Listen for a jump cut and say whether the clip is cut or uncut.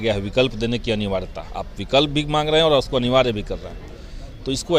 uncut